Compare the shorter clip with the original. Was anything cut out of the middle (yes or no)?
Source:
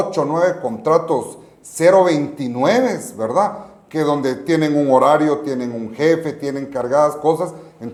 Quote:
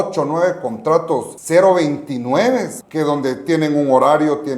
yes